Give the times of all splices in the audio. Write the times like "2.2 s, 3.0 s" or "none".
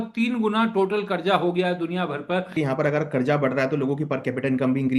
2.5 s